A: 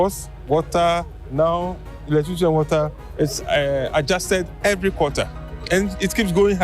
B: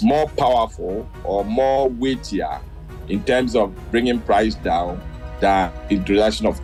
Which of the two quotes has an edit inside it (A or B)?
A